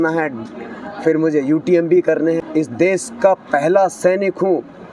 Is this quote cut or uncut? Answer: cut